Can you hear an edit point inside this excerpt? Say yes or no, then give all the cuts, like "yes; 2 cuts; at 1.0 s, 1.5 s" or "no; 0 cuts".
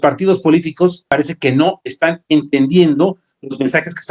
yes; 1 cut; at 1.1 s